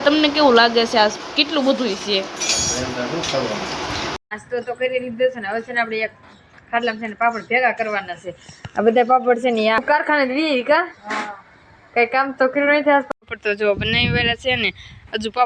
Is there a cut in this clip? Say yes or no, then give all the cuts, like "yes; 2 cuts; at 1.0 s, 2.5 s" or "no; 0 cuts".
yes; 3 cuts; at 4.1 s, 9.8 s, 13.1 s